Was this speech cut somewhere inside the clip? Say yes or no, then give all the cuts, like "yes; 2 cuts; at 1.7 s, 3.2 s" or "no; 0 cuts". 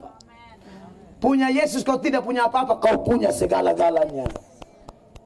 no; 0 cuts